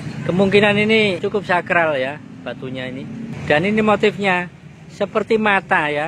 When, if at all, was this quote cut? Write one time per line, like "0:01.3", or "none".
0:01.2
0:03.3

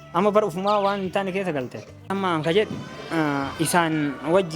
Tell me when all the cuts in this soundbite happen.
0:02.1

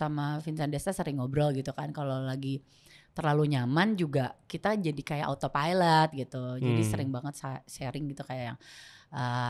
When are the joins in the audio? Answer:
none

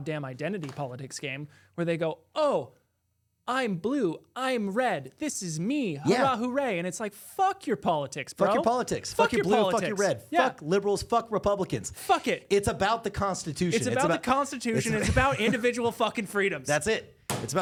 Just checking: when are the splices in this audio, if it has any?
none

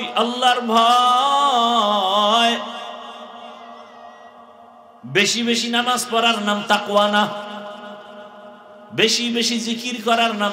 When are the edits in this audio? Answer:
none

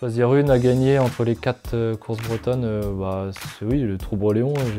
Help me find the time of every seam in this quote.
none

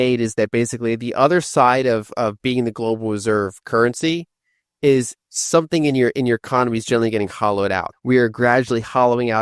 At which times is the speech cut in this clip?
0:07.9

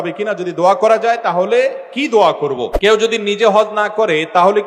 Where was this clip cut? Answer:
0:02.9

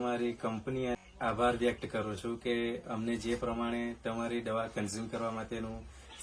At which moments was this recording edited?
0:00.9

